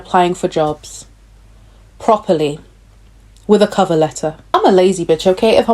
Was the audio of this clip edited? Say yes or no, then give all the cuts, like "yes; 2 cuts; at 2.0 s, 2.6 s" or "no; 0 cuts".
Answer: yes; 1 cut; at 4.5 s